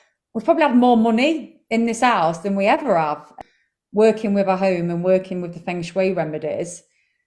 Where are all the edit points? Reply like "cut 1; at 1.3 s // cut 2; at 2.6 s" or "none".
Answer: cut 1; at 3.3 s